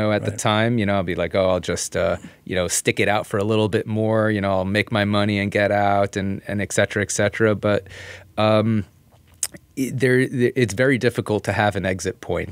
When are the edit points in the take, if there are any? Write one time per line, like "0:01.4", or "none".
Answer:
none

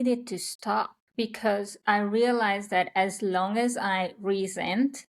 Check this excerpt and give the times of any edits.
0:01.0

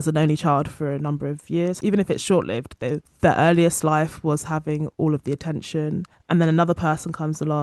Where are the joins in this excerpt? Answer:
0:01.8

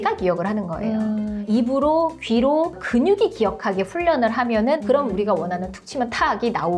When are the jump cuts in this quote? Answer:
0:01.4
0:04.8

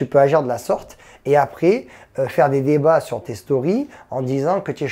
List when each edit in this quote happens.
none

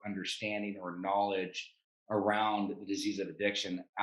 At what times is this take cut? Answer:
none

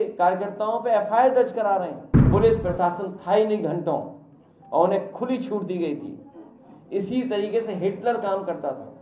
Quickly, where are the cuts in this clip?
0:02.3

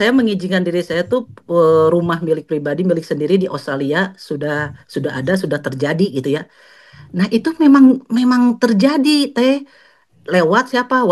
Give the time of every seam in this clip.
none

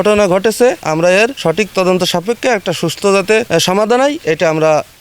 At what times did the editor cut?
0:00.9
0:03.5

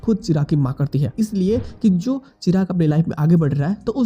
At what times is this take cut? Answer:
0:01.1

